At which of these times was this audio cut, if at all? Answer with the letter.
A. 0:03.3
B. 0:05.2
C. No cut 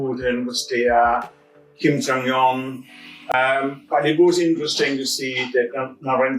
A